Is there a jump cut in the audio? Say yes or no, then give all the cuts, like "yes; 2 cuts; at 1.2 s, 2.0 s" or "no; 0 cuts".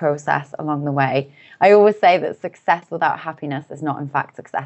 yes; 1 cut; at 2.9 s